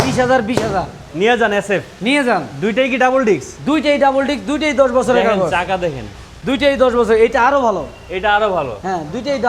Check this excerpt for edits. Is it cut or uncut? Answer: uncut